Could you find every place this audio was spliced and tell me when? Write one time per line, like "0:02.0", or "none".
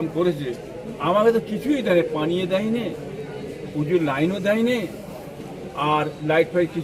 none